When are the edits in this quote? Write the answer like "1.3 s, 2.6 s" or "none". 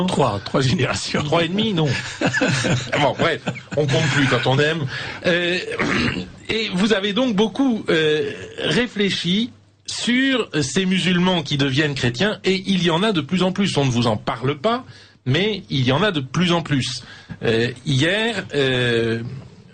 11.3 s